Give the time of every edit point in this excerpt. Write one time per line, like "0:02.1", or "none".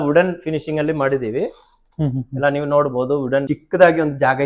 0:03.5